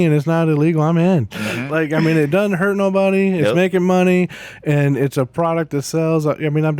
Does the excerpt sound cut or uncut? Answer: cut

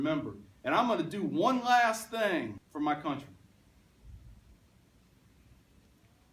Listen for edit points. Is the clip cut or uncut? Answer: cut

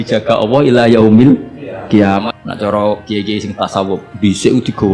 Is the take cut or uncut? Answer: cut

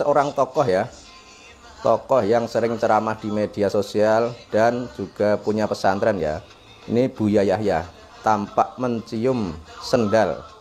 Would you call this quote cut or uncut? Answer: uncut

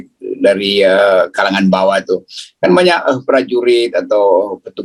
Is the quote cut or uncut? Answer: uncut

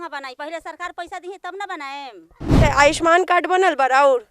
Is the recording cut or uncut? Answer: cut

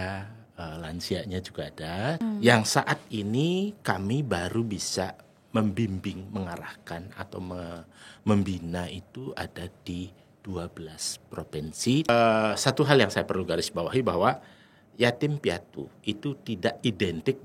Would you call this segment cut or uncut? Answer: cut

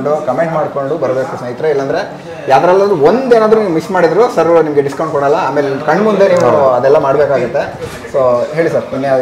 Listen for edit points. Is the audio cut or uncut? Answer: uncut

